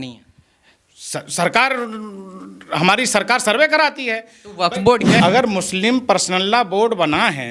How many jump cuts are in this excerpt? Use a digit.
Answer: 1